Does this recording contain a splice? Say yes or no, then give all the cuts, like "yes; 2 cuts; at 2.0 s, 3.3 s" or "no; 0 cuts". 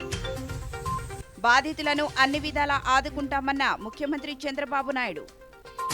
no; 0 cuts